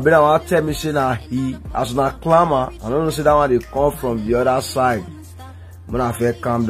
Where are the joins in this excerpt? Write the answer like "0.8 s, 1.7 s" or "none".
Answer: none